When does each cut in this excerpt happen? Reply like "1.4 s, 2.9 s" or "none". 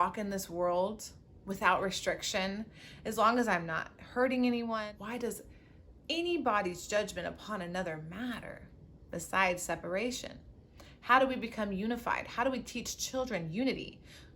4.8 s